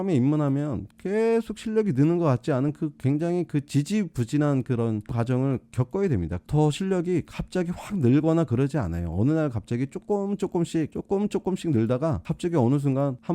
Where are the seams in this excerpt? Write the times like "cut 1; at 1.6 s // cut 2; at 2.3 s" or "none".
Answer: cut 1; at 6.4 s